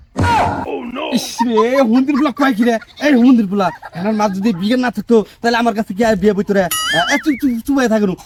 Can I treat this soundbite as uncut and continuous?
yes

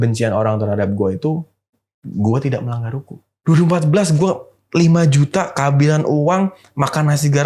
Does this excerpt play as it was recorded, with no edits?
no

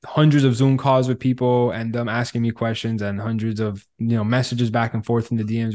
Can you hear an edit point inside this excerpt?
no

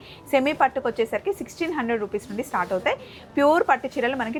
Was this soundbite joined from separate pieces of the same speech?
no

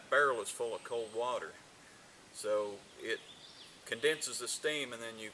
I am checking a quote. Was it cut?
yes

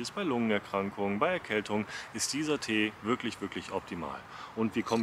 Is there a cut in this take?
no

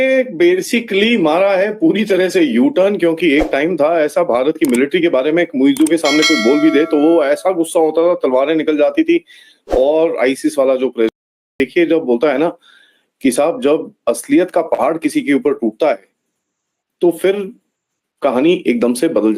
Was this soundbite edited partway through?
yes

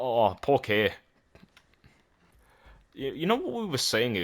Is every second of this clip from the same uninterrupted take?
no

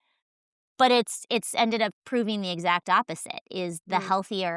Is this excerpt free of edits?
no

